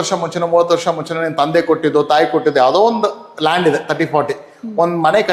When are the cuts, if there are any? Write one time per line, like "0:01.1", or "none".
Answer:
none